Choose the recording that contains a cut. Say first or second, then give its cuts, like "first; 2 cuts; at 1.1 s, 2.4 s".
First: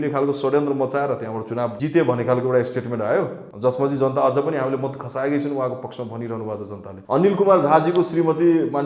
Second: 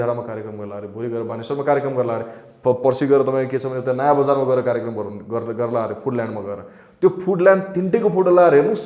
first; 3 cuts; at 1.8 s, 3.4 s, 6.9 s